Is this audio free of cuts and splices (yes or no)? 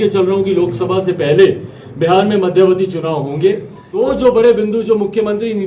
no